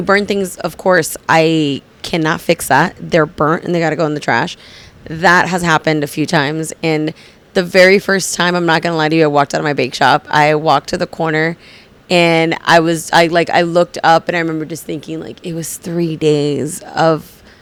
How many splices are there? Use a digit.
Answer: 0